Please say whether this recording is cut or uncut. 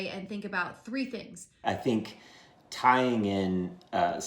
cut